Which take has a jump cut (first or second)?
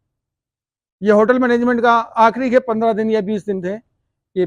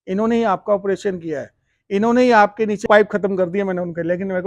second